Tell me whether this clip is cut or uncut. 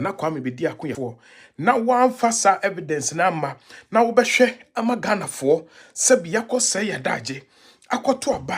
cut